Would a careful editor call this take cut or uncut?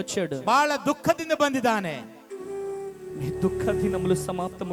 uncut